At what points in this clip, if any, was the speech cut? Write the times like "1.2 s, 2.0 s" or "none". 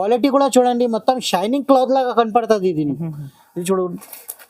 none